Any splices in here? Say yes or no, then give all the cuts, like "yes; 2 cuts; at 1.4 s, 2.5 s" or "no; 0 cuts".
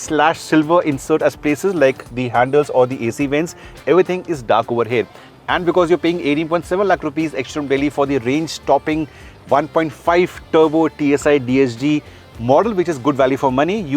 no; 0 cuts